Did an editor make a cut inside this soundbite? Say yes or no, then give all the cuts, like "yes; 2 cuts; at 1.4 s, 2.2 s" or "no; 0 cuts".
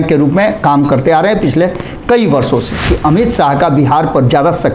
yes; 1 cut; at 2.8 s